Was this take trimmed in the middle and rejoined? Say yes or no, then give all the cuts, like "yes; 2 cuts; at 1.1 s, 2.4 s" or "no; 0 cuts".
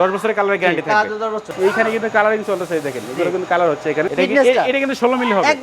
yes; 2 cuts; at 1.5 s, 4.1 s